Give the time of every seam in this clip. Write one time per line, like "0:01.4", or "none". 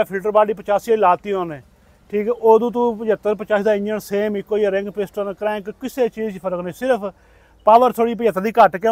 none

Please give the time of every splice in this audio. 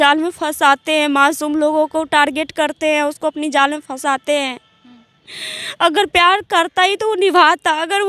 none

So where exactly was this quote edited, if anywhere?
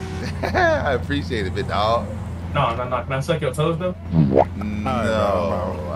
0:02.4

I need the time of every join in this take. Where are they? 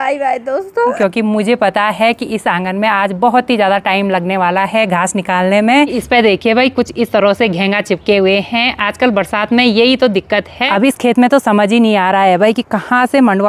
0:01.0
0:06.0
0:10.6

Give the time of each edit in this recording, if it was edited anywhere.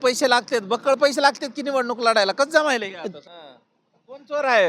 0:03.1

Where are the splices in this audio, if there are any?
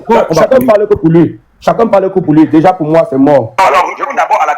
0:03.5

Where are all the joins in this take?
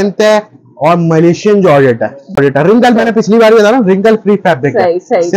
0:02.4

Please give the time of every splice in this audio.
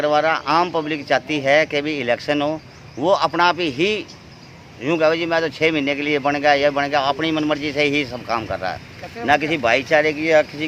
none

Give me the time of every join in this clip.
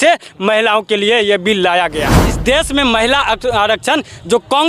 0:02.2

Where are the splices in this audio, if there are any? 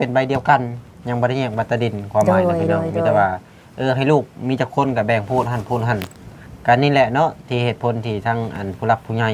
none

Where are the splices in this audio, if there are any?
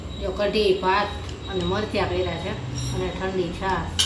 none

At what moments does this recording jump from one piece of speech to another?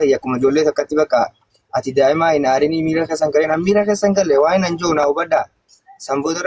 none

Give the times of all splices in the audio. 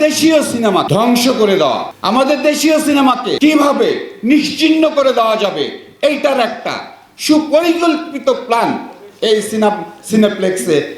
0:00.9
0:01.9
0:03.3

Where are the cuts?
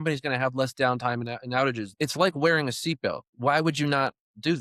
0:01.9
0:03.3

